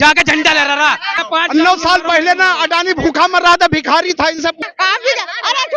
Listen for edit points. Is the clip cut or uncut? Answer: cut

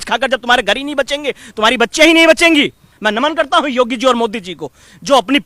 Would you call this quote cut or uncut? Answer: cut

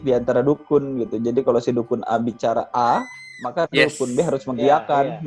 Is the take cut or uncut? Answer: uncut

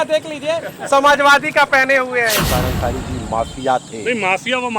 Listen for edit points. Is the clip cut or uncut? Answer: cut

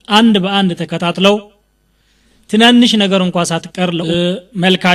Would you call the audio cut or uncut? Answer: cut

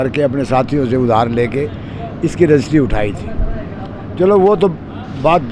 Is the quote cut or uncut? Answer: uncut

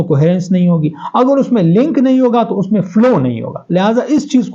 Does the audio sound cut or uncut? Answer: uncut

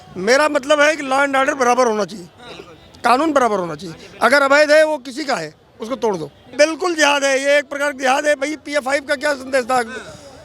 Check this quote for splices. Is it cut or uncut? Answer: cut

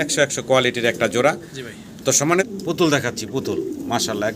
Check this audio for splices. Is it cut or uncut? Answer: cut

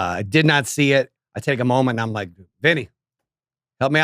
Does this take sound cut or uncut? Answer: cut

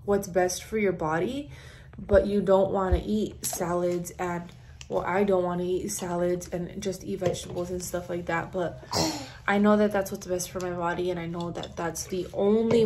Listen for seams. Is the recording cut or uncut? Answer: uncut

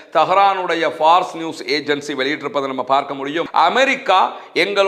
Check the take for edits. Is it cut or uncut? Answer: cut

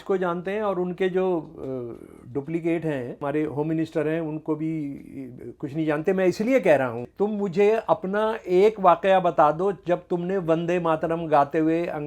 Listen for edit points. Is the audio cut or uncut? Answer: cut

